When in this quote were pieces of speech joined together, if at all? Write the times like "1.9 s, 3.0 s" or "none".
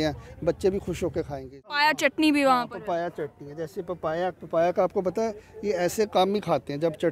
1.7 s